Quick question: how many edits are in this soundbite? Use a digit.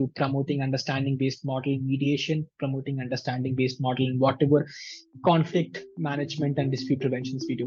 0